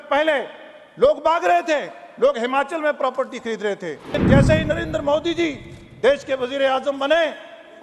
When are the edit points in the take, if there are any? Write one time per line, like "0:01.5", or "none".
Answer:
0:04.1

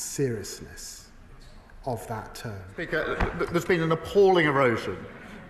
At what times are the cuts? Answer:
0:02.9

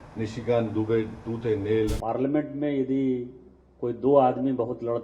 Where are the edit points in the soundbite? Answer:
0:02.0

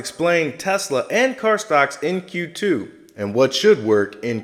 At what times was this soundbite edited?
none

